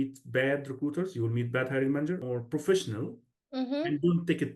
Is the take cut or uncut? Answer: cut